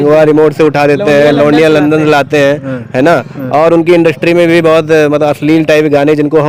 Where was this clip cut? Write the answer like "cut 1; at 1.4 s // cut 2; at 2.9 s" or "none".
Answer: none